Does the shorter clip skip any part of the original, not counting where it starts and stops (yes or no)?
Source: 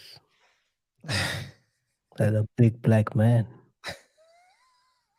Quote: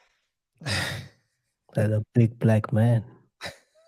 no